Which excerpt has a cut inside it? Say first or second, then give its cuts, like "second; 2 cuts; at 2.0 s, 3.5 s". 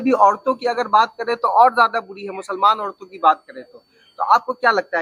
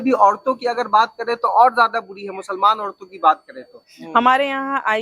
second; 1 cut; at 3.9 s